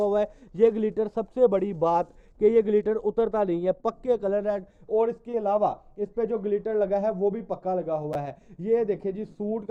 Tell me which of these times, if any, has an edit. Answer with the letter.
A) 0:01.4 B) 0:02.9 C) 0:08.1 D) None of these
D